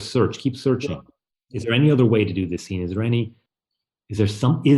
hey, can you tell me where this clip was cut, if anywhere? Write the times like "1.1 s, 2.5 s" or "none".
3.4 s